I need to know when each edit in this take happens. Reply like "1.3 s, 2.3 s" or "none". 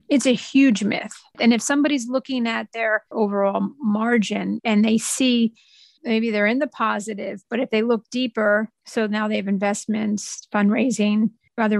6.0 s, 8.8 s